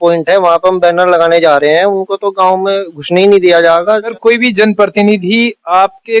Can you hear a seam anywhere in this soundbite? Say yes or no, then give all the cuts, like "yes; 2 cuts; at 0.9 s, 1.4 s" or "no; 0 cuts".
yes; 1 cut; at 4.1 s